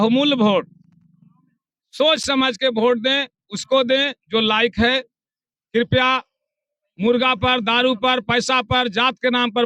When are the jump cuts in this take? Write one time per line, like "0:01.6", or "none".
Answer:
none